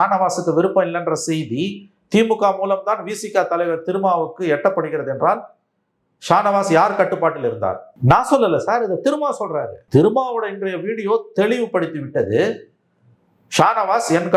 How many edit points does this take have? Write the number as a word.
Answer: two